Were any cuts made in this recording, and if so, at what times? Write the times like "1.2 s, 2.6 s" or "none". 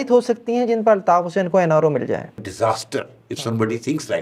2.4 s